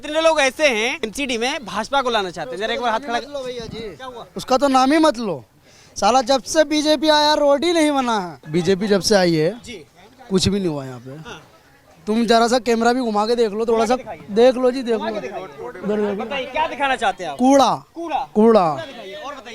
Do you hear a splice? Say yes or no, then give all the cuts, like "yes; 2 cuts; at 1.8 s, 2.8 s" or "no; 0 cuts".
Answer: yes; 2 cuts; at 1.1 s, 8.4 s